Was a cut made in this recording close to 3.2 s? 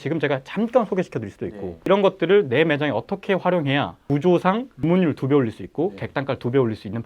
no; 2 cuts; at 1.7 s, 4.7 s

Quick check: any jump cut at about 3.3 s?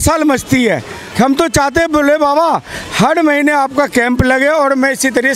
no; 1 cut; at 1.0 s

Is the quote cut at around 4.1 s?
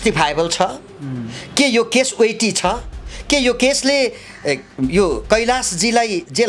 no; 0 cuts

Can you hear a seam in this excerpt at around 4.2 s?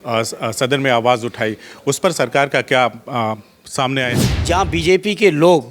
yes; 1 cut; at 4.2 s

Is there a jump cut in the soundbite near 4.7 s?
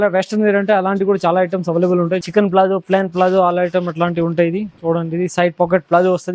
no; 1 cut; at 2.2 s

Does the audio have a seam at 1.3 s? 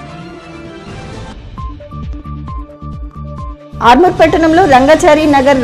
yes; 1 cut; at 1.3 s

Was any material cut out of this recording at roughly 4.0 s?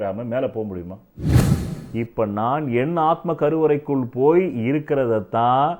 no; 1 cut; at 1.5 s

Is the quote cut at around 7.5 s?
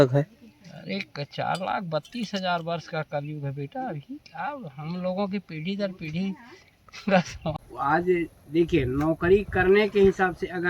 yes; 1 cut; at 7.5 s

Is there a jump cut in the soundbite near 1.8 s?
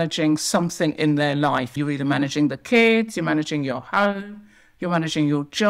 yes; 1 cut; at 1.8 s

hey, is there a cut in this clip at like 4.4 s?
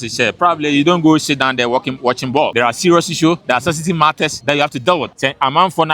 yes; 4 cuts; at 2.5 s, 3.4 s, 4.4 s, 5.1 s

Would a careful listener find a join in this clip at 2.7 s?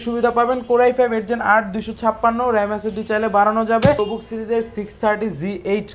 no; 1 cut; at 4.0 s

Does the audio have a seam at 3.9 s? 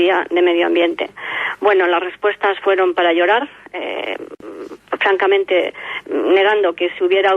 yes; 1 cut; at 3.9 s

